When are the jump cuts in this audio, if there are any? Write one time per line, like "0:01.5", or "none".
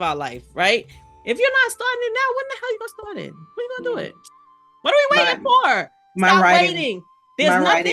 0:01.0